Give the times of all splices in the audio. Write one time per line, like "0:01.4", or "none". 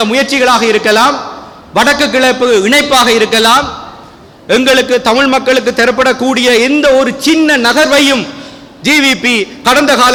none